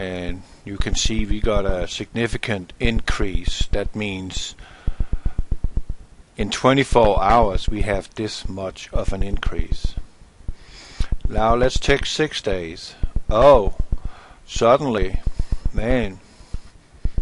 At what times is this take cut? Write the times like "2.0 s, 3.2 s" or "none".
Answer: none

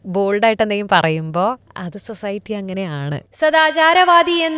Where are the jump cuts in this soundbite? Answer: 1.7 s, 3.2 s

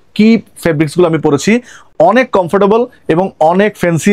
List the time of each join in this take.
none

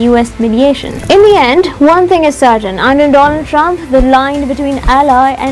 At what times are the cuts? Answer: 0.9 s

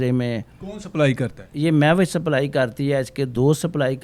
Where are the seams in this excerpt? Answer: none

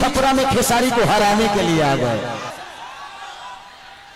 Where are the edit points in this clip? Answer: 2.5 s

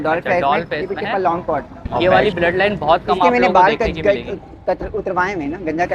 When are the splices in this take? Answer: 2.0 s

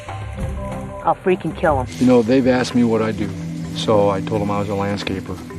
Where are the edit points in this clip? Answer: 1.9 s

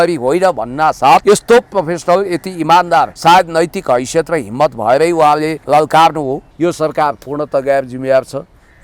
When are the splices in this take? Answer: 1.2 s, 3.1 s, 5.6 s, 6.5 s

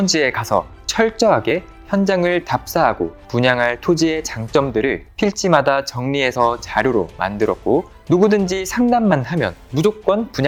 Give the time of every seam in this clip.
none

